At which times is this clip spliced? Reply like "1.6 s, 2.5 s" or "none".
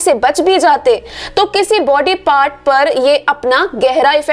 none